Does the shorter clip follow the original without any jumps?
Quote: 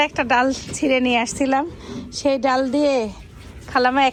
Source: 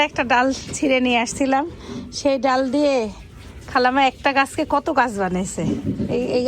yes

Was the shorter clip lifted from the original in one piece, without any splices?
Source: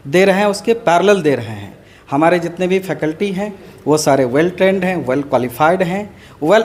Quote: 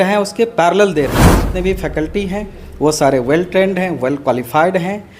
no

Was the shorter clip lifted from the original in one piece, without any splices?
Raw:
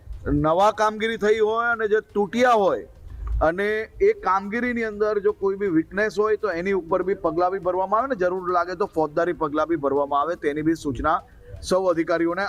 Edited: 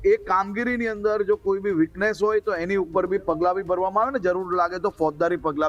yes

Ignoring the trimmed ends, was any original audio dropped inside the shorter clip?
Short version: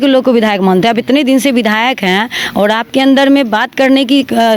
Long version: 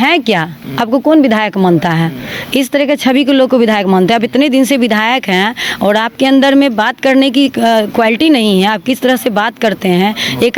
no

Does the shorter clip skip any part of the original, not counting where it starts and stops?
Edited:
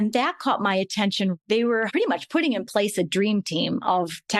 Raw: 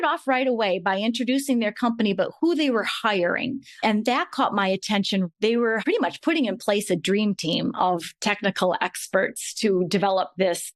no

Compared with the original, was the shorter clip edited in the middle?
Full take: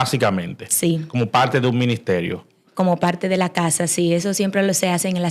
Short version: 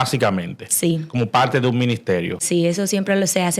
yes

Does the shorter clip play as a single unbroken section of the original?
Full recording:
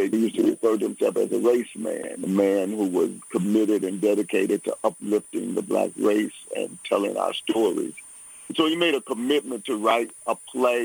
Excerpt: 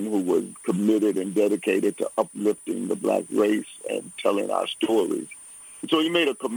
yes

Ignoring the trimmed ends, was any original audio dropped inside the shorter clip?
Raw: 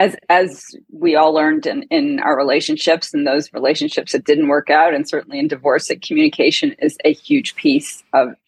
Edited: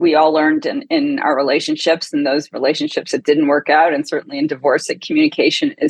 no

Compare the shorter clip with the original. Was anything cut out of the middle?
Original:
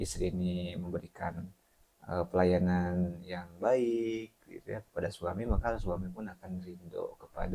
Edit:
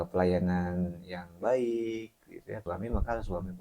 yes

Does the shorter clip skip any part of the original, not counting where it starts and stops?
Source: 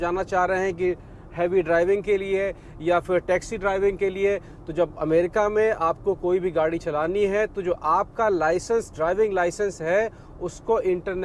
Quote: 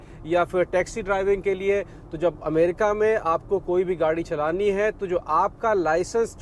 no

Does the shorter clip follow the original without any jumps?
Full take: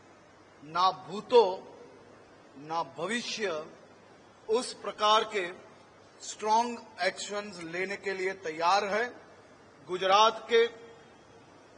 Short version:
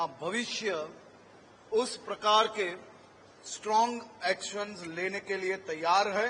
yes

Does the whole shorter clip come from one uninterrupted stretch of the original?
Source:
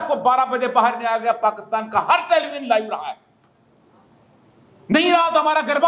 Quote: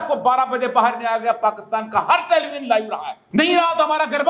no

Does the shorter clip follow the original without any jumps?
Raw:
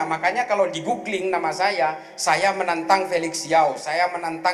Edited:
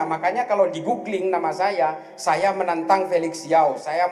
yes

